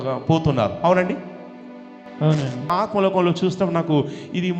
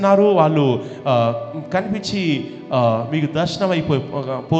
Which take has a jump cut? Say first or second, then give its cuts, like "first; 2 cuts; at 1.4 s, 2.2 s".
first; 1 cut; at 2.7 s